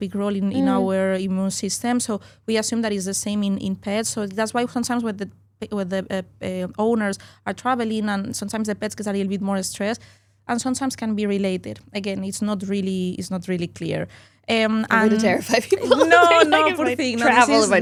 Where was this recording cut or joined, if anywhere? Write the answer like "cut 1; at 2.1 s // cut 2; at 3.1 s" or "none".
none